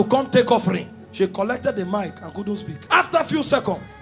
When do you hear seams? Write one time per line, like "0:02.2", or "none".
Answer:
0:02.7